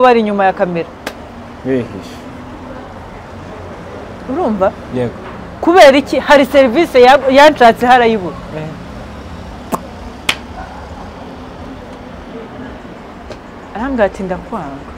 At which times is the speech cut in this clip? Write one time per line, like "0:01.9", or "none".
none